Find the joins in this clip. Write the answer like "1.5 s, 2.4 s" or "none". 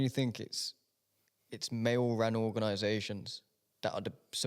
none